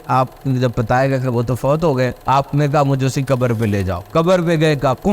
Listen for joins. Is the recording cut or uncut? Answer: cut